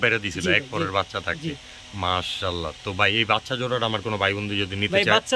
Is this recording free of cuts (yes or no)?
yes